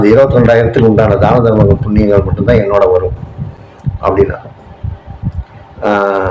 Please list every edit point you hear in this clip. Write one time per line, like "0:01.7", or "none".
none